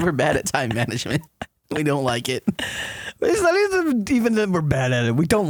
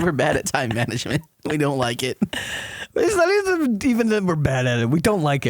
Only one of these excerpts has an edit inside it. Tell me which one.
second; 1 cut; at 1.3 s

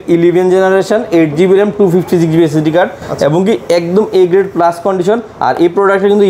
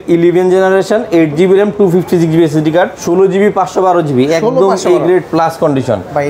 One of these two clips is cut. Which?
second; 1 cut; at 3.0 s

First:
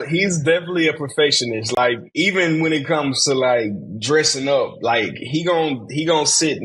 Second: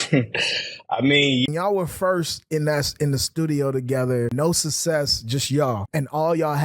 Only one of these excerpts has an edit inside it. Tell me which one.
second; 3 cuts; at 1.5 s, 4.3 s, 5.9 s

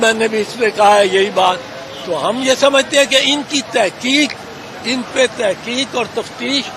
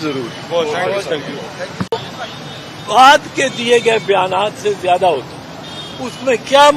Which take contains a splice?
second; 1 cut; at 1.9 s

